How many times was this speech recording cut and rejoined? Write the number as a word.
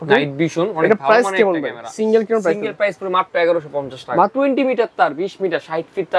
one